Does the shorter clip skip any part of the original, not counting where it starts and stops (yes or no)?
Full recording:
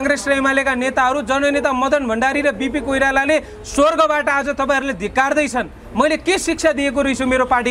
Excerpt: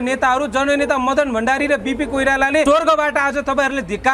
yes